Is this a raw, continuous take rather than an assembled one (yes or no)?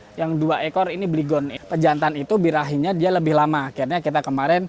no